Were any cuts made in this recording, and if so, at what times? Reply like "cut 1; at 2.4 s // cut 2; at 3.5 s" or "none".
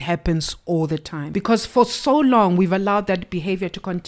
cut 1; at 1.2 s